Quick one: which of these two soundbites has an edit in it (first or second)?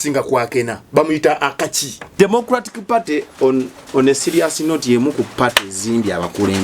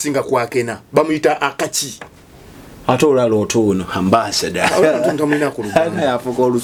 first